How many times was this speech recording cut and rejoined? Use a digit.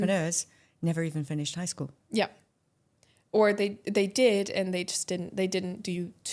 0